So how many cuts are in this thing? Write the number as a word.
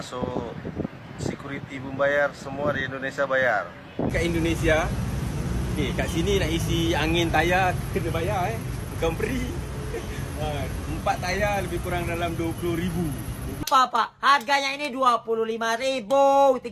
two